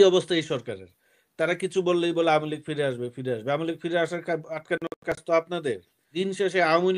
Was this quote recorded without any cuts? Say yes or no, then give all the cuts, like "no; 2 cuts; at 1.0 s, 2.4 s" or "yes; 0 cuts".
no; 1 cut; at 6.1 s